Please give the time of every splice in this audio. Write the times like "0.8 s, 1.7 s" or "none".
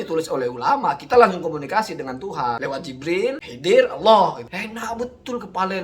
3.0 s, 4.5 s